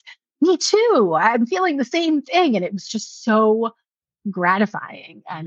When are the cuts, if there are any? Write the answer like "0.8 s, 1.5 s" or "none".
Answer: none